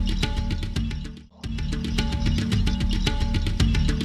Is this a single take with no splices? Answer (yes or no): no